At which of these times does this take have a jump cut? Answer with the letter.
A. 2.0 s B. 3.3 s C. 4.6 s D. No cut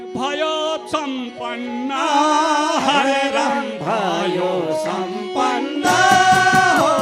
D